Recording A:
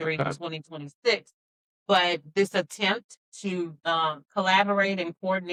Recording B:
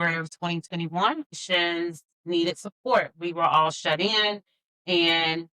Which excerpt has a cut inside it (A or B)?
B